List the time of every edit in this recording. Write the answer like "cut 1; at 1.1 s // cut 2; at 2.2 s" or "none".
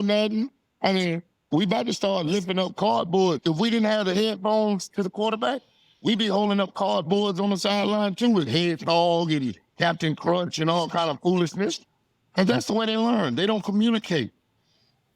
none

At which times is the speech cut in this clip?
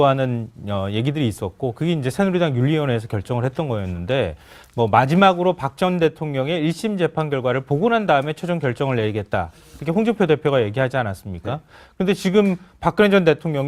none

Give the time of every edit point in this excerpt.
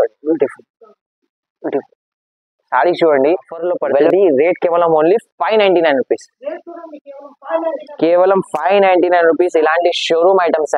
cut 1; at 4.0 s

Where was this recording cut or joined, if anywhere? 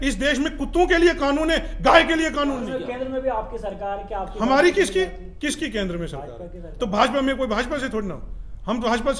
cut 1; at 2.6 s

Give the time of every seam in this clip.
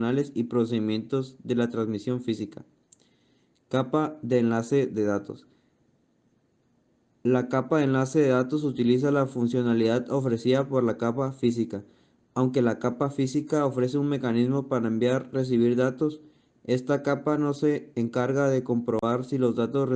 cut 1; at 14.1 s

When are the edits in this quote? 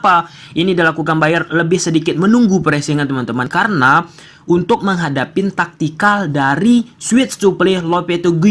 cut 1; at 3.5 s

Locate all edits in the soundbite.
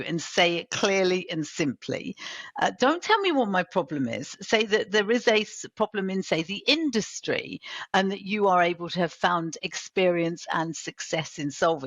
none

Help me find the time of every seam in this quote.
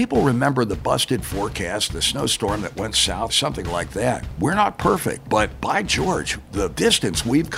cut 1; at 3.3 s // cut 2; at 4.3 s // cut 3; at 5.5 s // cut 4; at 6.7 s

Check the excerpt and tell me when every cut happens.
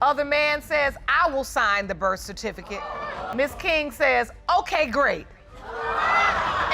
cut 1; at 3.3 s

